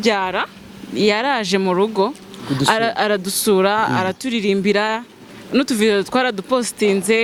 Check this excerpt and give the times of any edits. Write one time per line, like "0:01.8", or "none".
none